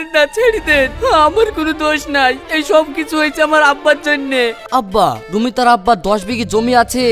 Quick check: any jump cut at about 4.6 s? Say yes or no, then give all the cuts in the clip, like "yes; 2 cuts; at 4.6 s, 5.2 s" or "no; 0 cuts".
yes; 1 cut; at 4.6 s